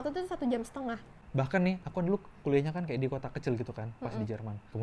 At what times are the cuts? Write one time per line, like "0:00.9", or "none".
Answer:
0:01.1